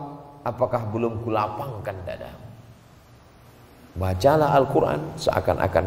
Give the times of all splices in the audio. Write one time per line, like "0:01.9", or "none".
0:03.5